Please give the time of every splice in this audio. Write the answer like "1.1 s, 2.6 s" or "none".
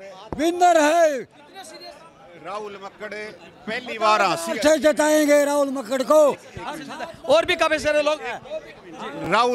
none